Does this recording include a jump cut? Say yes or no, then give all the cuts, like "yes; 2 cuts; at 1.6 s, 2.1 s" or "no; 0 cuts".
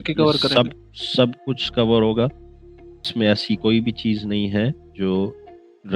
yes; 1 cut; at 3.0 s